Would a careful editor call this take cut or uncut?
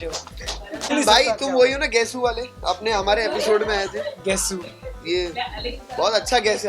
cut